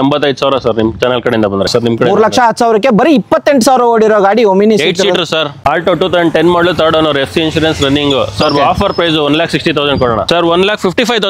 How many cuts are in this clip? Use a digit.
3